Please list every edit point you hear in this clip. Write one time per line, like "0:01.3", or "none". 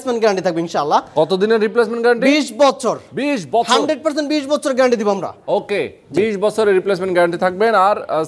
none